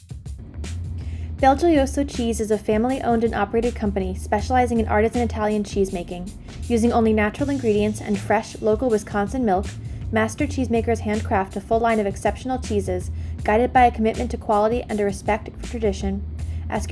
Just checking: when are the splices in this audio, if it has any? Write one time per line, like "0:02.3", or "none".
0:01.2